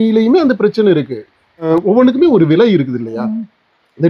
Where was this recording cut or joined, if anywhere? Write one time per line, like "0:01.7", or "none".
0:01.6